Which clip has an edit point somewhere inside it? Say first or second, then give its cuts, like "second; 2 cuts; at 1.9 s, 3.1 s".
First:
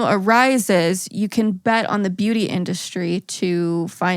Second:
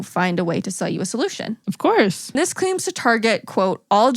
second; 2 cuts; at 1.6 s, 2.3 s